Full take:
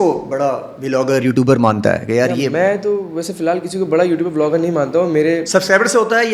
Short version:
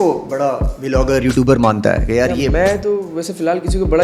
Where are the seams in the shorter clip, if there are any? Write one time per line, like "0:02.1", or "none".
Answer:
none